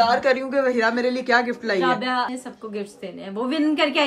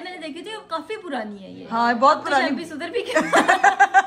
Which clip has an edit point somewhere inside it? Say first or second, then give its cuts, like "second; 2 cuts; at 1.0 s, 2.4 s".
first; 1 cut; at 2.3 s